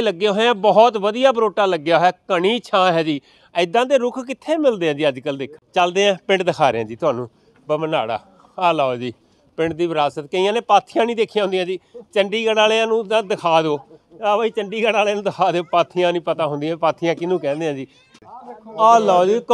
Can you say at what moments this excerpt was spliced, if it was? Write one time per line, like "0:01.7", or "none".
0:05.5
0:18.0